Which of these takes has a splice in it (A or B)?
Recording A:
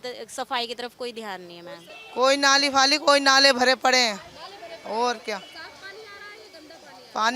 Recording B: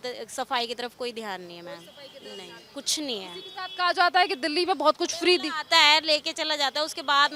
A